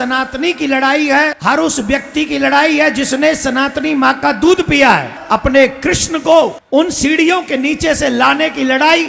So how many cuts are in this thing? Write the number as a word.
three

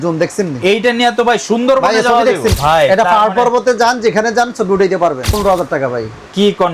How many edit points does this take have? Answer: two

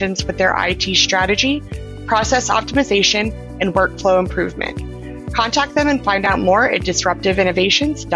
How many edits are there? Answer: zero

